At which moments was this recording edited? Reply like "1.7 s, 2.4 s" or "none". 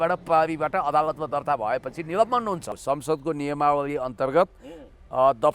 2.7 s

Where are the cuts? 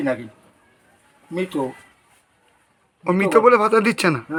none

